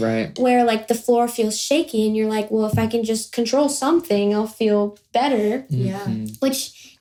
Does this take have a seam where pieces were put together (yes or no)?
no